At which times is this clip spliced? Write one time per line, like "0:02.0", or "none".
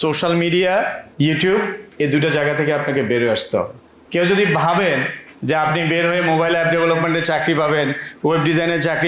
0:03.9

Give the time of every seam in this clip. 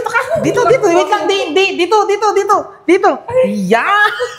none

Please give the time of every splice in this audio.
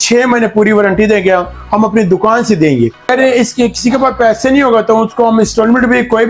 0:03.1

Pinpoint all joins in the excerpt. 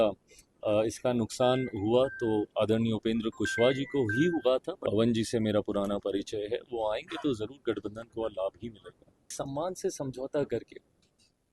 0:04.7
0:09.3

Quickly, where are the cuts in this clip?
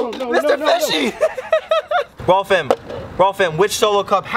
none

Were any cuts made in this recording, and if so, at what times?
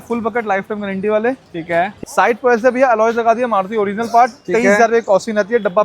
0:01.9

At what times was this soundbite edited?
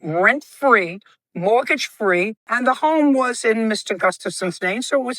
0:02.4

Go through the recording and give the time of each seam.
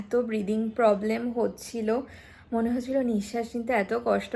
none

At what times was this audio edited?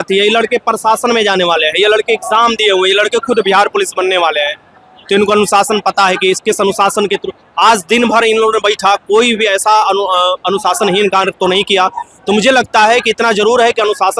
none

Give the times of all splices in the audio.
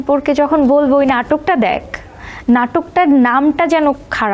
none

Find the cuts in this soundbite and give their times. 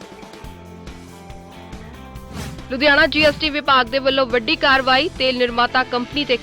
0:01.5

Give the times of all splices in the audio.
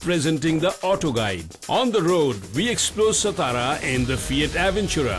0:01.5

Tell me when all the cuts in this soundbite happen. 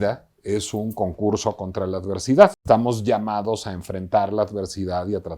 0:02.6

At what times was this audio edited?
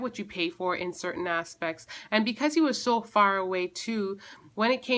none

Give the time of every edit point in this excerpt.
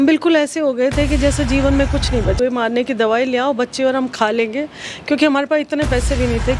0:02.4

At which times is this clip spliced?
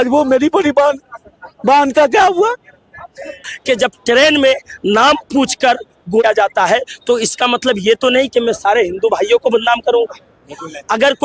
0:03.5

